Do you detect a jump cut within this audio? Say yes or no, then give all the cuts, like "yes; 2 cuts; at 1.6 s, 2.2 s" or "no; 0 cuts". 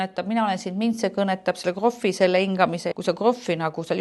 yes; 1 cut; at 2.9 s